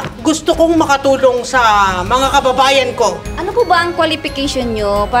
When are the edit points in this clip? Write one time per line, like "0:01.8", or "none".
0:03.3